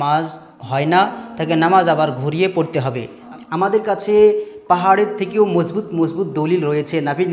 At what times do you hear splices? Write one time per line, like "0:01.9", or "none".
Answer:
0:03.2